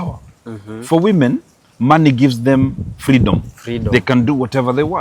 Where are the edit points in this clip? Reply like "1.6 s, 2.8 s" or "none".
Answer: none